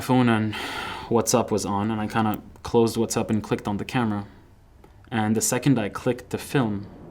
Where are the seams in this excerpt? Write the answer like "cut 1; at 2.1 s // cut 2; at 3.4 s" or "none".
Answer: none

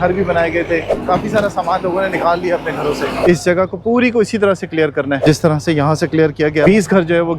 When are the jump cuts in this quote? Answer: cut 1; at 1.0 s // cut 2; at 3.2 s // cut 3; at 5.2 s // cut 4; at 6.7 s

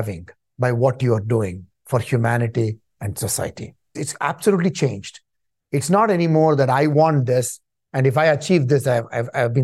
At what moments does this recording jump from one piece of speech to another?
cut 1; at 4.0 s

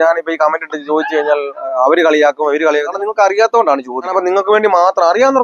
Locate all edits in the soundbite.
cut 1; at 2.9 s // cut 2; at 4.1 s

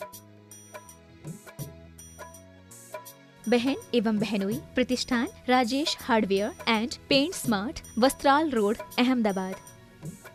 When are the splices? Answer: none

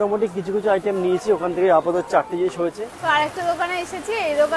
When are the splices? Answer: cut 1; at 2.9 s

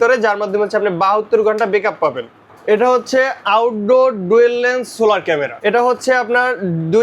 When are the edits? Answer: cut 1; at 2.4 s // cut 2; at 5.5 s

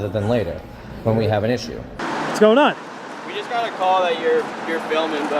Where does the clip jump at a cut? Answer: cut 1; at 2.0 s

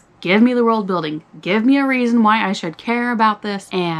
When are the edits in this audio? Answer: none

